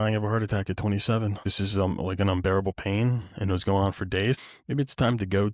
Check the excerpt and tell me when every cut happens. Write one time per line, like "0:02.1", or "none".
0:01.5
0:04.4